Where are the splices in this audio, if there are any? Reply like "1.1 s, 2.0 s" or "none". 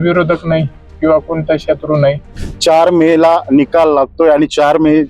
2.4 s